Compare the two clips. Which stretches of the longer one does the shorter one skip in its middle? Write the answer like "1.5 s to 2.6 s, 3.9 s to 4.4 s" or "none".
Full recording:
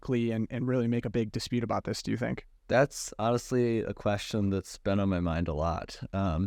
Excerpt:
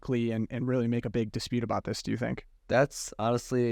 none